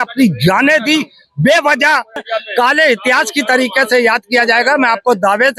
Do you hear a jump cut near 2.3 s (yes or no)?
yes